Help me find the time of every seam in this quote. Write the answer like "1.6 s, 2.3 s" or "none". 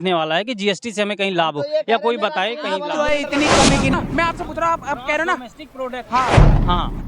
3.9 s